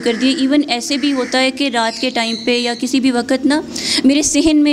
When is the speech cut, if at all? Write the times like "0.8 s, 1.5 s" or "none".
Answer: none